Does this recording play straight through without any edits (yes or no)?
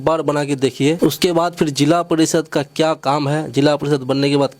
no